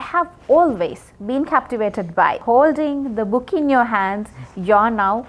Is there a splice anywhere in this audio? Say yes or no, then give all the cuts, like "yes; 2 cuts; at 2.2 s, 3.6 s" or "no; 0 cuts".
yes; 1 cut; at 2.4 s